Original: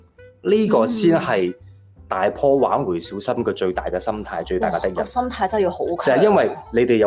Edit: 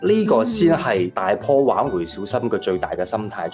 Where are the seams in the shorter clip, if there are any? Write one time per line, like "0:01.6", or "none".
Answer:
0:01.1